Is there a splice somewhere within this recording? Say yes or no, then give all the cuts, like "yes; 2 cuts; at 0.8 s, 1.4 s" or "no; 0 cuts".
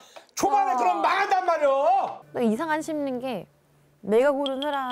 yes; 1 cut; at 2.2 s